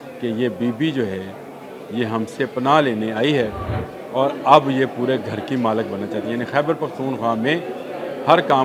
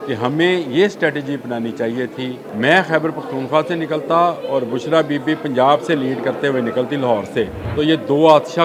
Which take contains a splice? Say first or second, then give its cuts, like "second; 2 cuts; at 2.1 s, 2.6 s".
second; 2 cuts; at 2.4 s, 7.6 s